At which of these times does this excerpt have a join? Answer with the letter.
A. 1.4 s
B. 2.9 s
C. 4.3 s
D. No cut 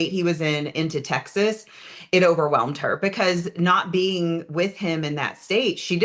D